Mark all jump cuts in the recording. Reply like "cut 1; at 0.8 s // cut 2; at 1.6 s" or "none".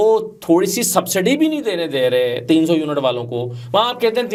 none